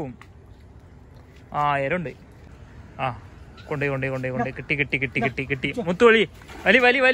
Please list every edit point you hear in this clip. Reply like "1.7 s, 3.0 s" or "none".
2.3 s